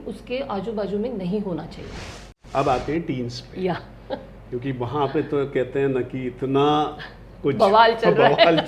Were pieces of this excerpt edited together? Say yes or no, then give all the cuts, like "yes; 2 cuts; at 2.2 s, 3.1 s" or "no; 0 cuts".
yes; 1 cut; at 2.4 s